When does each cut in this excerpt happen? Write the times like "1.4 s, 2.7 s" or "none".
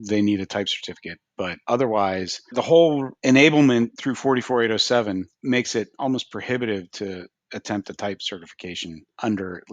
1.6 s, 2.5 s, 3.1 s, 4.0 s, 5.3 s